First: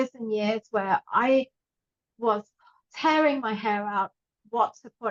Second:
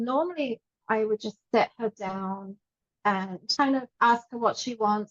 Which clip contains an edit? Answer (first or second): second